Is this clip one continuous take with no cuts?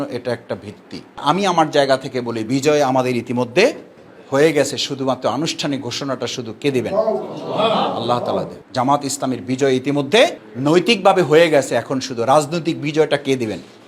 no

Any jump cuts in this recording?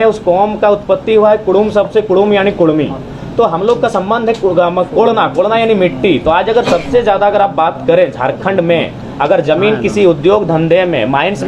no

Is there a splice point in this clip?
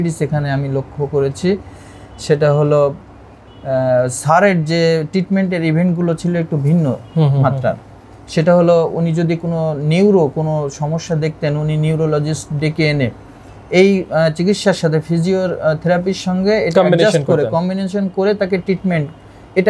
no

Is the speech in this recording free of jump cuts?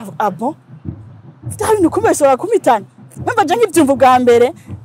yes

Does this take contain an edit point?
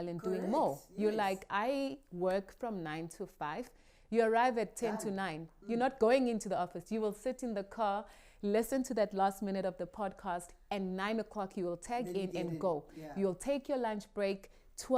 no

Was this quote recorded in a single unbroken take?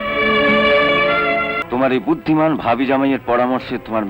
no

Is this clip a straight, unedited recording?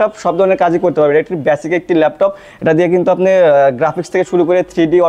yes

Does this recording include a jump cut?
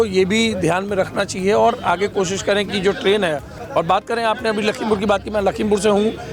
yes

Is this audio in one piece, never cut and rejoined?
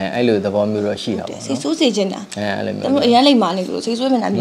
yes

